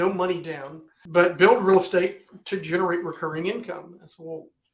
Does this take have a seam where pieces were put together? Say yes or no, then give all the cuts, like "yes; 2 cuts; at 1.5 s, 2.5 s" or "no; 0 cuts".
yes; 1 cut; at 1.0 s